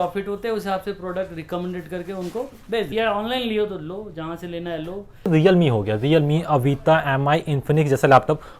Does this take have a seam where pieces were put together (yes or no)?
yes